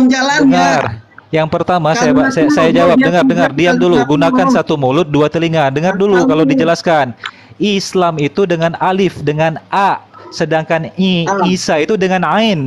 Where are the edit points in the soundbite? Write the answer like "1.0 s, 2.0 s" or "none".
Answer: none